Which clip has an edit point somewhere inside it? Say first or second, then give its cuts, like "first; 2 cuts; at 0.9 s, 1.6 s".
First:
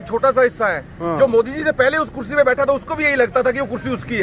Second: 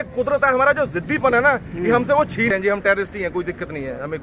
second; 1 cut; at 2.5 s